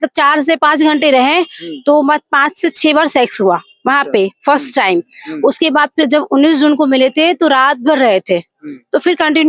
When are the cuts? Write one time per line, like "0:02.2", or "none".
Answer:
none